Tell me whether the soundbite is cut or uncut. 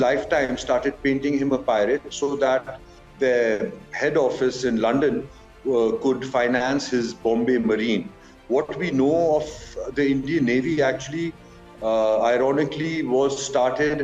uncut